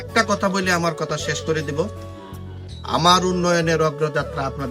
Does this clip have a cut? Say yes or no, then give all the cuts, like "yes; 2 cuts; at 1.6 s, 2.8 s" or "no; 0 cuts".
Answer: no; 0 cuts